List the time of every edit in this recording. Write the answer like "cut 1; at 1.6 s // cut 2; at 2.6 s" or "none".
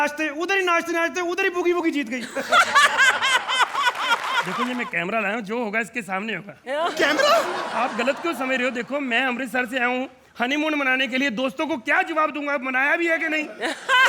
cut 1; at 4.5 s